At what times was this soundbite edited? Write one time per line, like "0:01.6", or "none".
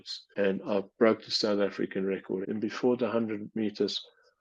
0:02.4